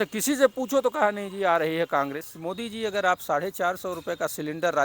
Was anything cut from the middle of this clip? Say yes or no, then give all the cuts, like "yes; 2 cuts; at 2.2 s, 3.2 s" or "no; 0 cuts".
yes; 1 cut; at 2.3 s